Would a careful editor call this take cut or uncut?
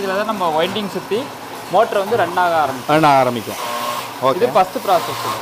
uncut